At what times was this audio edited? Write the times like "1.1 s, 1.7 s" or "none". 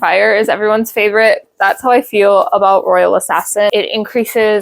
3.7 s